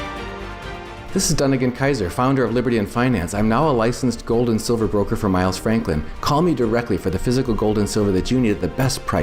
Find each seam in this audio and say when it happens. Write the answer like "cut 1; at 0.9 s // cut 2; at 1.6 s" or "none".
cut 1; at 0.9 s